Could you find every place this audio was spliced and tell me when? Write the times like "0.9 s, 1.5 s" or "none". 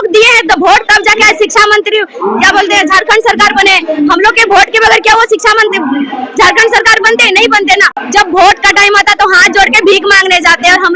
8.0 s